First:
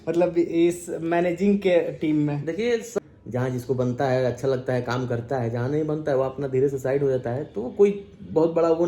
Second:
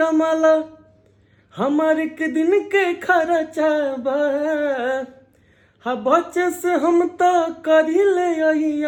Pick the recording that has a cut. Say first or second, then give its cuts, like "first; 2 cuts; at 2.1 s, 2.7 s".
first; 1 cut; at 3.0 s